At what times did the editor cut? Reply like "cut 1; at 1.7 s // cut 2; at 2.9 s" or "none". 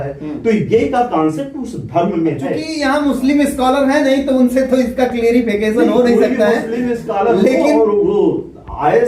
cut 1; at 2.7 s